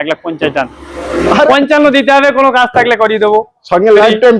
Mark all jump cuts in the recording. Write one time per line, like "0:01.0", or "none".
0:01.5